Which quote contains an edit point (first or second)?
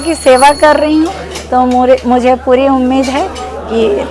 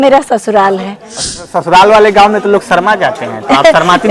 second